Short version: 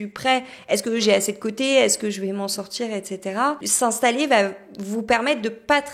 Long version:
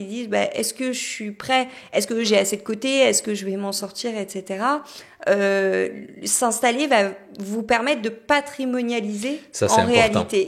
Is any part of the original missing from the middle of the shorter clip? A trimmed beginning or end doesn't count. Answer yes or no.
yes